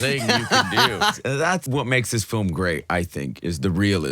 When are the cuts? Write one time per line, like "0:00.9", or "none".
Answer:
0:01.5